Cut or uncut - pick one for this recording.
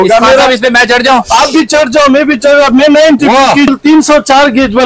cut